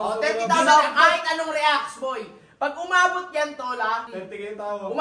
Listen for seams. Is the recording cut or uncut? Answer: cut